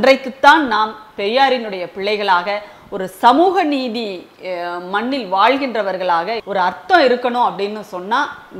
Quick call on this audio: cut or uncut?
cut